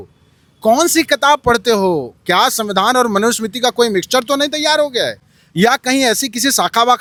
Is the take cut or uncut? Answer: uncut